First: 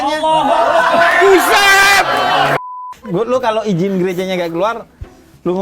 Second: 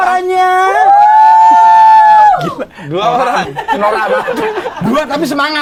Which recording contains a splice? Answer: first; 1 cut; at 2.6 s

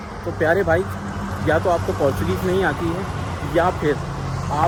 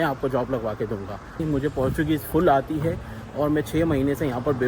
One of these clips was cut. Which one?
second; 1 cut; at 1.4 s

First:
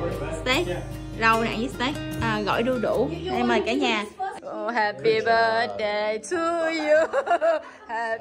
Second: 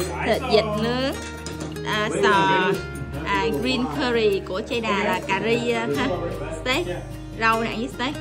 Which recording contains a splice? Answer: first; 1 cut; at 4.4 s

